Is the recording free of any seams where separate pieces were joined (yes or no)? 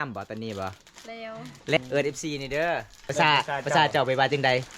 no